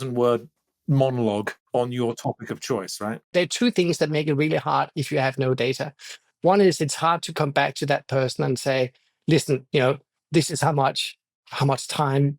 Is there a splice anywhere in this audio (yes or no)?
yes